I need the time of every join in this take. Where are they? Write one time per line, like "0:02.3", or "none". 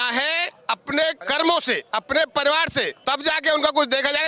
0:01.2
0:01.8
0:03.0